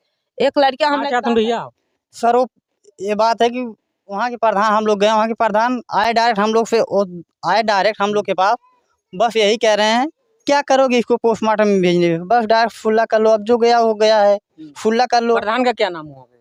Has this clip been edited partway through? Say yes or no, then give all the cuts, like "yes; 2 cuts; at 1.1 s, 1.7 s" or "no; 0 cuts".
no; 0 cuts